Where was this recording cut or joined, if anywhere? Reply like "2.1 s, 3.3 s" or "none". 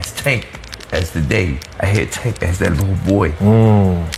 none